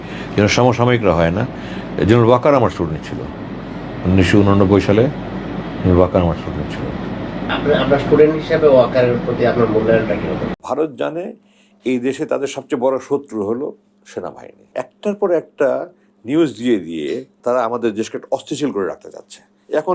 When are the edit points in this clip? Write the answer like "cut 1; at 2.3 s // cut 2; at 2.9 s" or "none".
cut 1; at 10.6 s // cut 2; at 14.7 s // cut 3; at 17.3 s